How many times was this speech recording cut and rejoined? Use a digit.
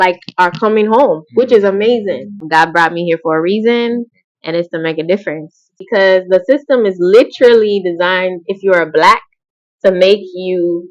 2